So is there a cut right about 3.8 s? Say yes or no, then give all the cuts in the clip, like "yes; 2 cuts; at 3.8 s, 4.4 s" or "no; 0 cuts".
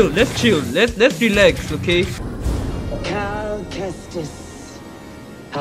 no; 1 cut; at 2.2 s